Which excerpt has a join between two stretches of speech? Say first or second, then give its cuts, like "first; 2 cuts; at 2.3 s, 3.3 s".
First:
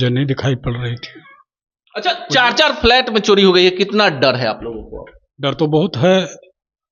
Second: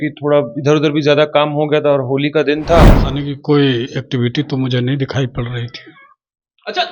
second; 1 cut; at 3.0 s